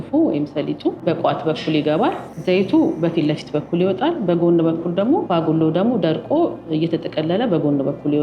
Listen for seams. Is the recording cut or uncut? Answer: cut